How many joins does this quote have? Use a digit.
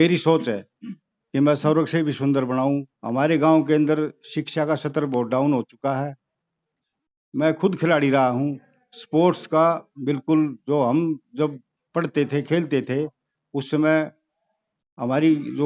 1